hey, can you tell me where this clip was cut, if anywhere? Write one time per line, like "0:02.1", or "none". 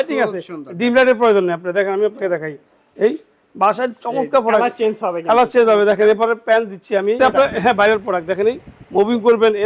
0:07.2